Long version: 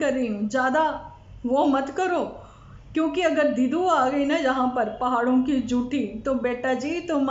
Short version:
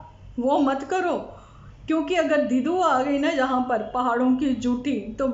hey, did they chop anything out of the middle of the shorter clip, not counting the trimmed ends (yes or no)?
no